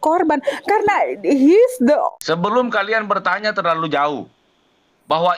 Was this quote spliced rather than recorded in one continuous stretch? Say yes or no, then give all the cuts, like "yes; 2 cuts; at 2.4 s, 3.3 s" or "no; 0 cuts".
yes; 1 cut; at 2.1 s